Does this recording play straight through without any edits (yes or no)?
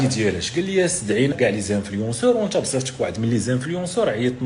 no